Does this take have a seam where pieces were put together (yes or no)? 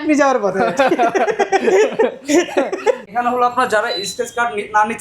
yes